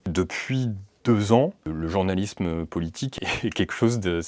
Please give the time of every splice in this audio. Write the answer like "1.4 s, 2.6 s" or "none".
3.1 s